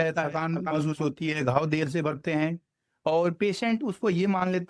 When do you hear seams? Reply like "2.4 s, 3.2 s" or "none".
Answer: none